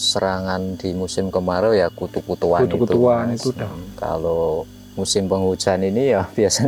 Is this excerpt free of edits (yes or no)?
yes